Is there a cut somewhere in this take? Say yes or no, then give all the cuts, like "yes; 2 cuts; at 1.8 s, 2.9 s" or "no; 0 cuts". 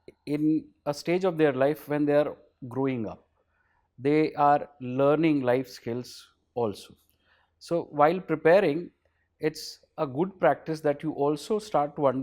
no; 0 cuts